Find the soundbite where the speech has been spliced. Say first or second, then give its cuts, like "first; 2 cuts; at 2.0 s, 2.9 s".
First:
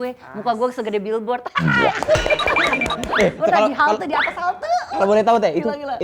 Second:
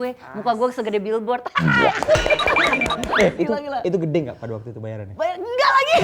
second; 1 cut; at 3.4 s